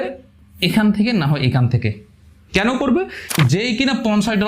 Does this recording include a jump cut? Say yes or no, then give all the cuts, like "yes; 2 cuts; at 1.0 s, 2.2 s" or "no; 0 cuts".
yes; 1 cut; at 3.4 s